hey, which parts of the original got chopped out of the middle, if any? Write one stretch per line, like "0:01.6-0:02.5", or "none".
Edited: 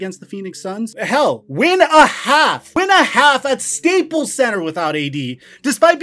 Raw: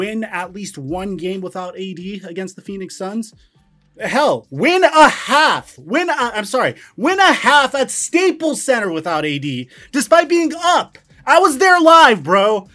0:03.3-0:04.0
0:05.7-0:06.9